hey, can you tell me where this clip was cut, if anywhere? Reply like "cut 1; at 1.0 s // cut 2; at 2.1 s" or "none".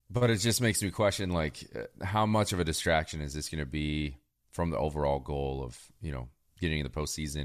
none